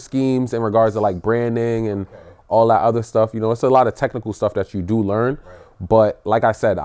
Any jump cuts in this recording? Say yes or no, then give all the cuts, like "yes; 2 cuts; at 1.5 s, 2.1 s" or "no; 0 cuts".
no; 0 cuts